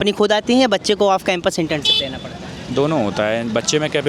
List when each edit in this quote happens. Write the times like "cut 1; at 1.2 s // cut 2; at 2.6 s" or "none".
none

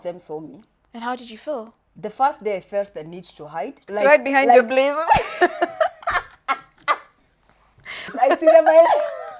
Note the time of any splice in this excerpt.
cut 1; at 1.8 s // cut 2; at 3.8 s // cut 3; at 8.1 s

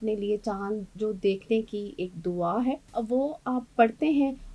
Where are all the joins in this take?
cut 1; at 2.8 s

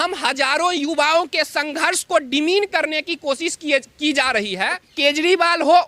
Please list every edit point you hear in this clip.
cut 1; at 4.9 s

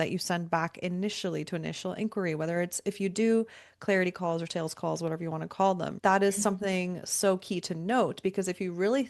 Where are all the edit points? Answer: cut 1; at 5.9 s

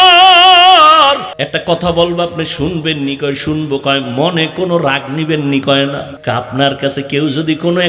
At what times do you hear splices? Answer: cut 1; at 1.3 s // cut 2; at 6.1 s

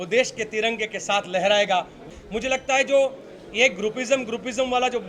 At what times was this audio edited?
cut 1; at 2.0 s

